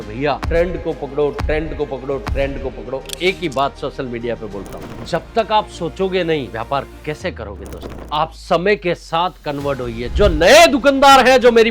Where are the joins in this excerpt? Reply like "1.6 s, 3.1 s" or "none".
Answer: 4.7 s, 6.5 s